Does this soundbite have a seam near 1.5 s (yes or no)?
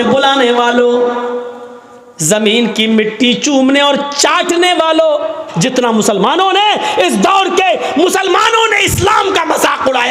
no